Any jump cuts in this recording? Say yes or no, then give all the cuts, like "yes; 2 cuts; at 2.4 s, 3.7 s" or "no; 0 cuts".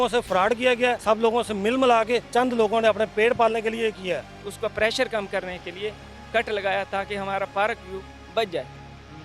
yes; 3 cuts; at 1.0 s, 2.3 s, 4.4 s